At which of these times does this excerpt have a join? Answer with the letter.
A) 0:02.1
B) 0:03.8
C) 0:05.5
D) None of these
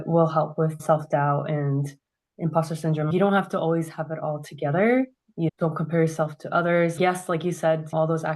C